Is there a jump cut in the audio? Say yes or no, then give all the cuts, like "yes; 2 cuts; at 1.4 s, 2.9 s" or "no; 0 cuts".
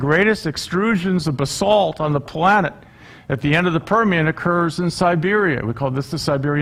no; 0 cuts